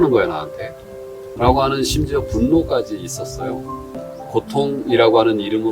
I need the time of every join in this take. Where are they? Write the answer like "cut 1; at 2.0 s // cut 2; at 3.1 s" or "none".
cut 1; at 4.1 s